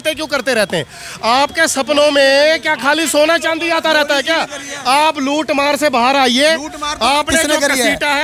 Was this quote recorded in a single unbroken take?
yes; 0 cuts

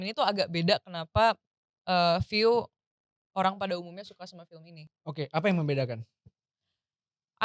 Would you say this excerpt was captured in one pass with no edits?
yes; 0 cuts

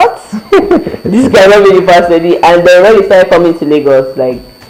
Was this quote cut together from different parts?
no; 0 cuts

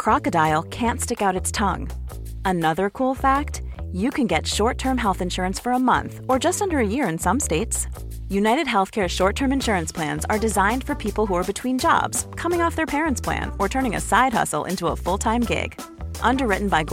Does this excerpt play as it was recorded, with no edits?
yes; 0 cuts

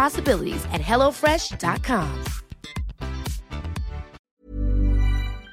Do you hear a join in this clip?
yes; 1 cut; at 4.2 s

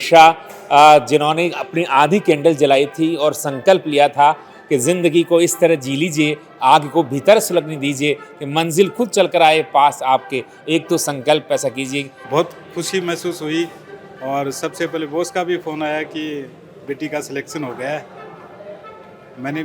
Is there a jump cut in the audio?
yes; 1 cut; at 12.1 s

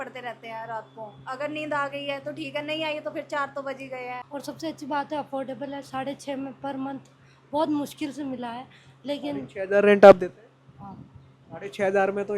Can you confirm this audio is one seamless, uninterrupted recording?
no; 1 cut; at 4.2 s

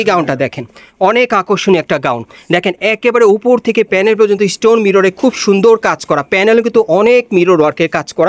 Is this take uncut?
yes; 0 cuts

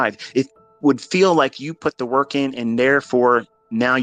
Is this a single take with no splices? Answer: yes; 0 cuts

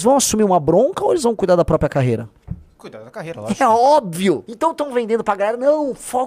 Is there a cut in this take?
yes; 1 cut; at 4.4 s

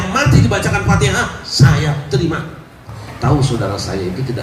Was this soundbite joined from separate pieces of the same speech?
yes; 1 cut; at 3.0 s

